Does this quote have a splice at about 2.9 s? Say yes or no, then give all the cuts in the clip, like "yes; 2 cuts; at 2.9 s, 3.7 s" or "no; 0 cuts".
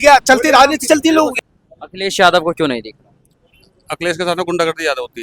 no; 1 cut; at 1.4 s